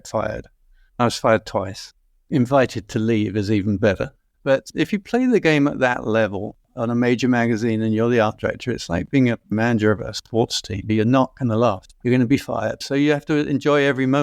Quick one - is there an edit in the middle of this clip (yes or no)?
yes